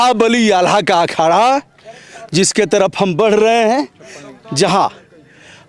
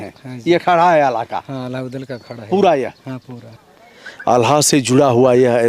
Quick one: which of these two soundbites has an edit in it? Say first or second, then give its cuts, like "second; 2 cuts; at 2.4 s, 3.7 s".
second; 1 cut; at 3.7 s